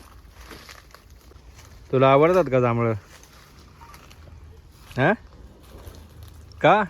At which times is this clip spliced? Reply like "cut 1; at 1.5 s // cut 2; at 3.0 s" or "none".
cut 1; at 1.3 s